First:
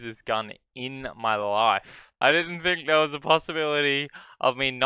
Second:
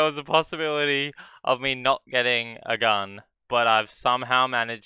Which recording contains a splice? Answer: first; 1 cut; at 2.0 s

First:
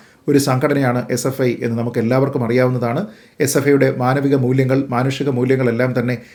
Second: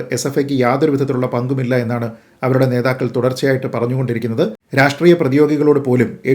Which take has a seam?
second; 1 cut; at 4.6 s

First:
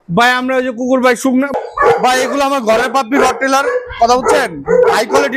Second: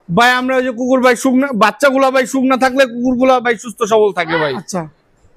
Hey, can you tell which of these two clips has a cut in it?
first; 1 cut; at 1.6 s

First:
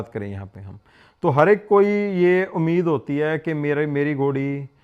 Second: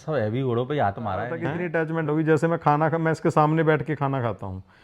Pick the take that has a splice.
second; 1 cut; at 1.5 s

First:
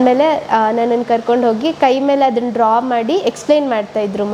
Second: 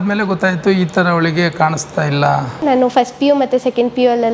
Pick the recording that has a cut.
second; 1 cut; at 2.6 s

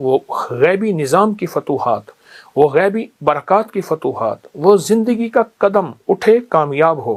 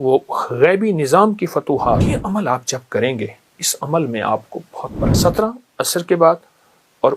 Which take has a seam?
second; 2 cuts; at 2.1 s, 5.1 s

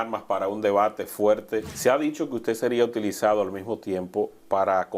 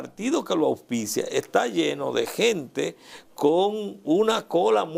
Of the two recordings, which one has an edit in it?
first; 1 cut; at 1.7 s

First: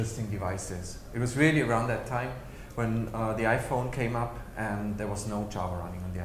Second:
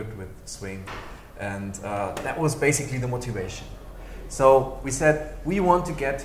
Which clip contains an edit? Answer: first; 1 cut; at 1.3 s

